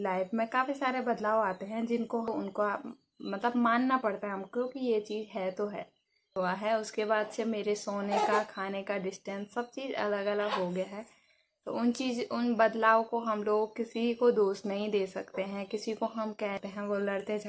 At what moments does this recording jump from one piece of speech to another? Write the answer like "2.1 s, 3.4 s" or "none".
2.3 s, 6.4 s, 16.6 s